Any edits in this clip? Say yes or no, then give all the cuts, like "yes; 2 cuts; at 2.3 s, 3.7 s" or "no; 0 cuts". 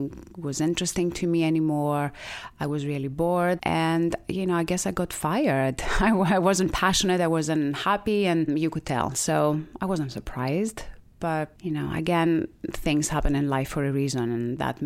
no; 0 cuts